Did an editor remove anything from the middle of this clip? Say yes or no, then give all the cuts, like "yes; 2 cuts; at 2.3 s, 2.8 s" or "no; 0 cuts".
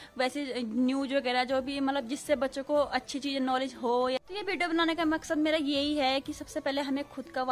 yes; 1 cut; at 4.2 s